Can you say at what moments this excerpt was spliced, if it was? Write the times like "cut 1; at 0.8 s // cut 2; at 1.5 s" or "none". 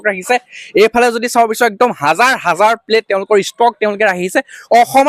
none